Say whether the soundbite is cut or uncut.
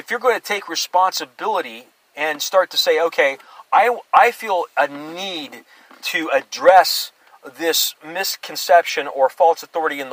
uncut